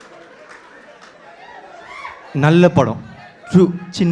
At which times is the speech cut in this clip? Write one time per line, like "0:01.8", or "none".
0:01.2

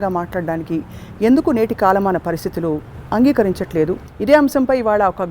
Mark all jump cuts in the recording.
0:04.1

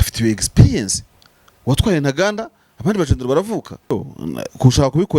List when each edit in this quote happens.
0:03.9

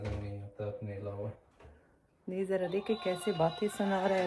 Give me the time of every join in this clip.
none

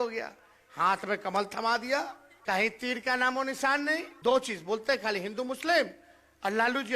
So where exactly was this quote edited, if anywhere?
0:02.2
0:04.1

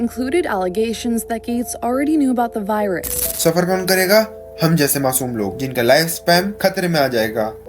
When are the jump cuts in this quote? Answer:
0:03.2

